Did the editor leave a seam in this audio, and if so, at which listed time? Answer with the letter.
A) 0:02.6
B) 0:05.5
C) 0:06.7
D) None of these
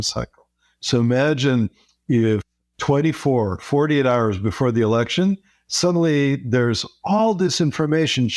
A